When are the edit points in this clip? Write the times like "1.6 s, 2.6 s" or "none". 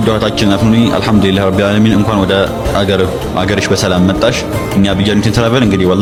none